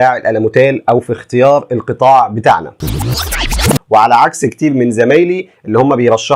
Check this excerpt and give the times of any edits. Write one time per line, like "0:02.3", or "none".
0:03.3